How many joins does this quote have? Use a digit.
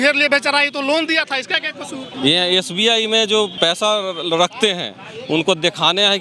2